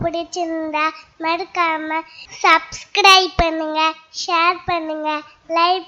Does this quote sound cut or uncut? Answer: uncut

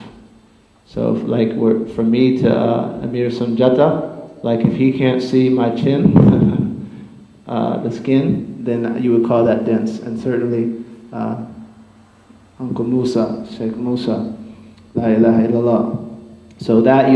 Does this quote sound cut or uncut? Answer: uncut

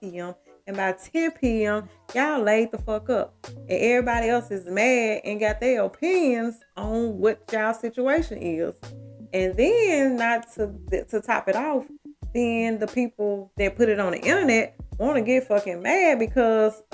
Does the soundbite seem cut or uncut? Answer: uncut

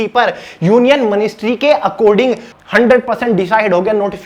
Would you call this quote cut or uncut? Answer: cut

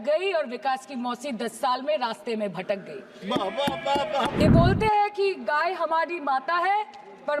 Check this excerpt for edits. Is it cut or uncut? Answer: cut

